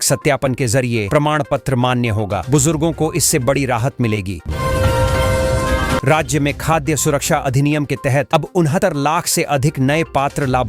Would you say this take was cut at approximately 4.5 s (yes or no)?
yes